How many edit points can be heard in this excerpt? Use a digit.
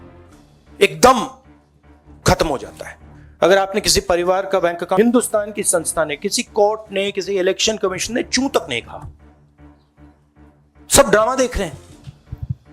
3